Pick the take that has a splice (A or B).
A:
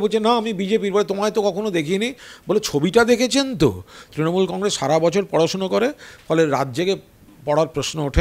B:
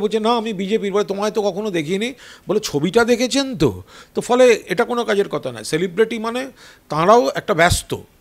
A